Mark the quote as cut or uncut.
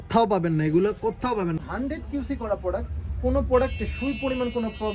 cut